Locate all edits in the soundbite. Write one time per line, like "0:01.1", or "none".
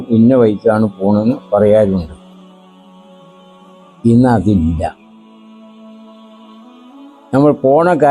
0:02.5
0:04.0
0:05.6
0:07.3